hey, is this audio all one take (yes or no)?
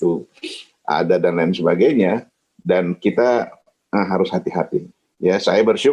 no